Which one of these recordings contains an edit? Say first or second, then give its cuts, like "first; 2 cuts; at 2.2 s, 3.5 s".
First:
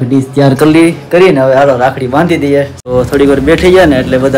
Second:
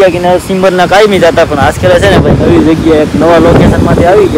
first; 1 cut; at 2.8 s